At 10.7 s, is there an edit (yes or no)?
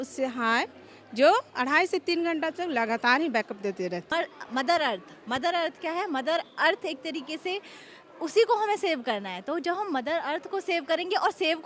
no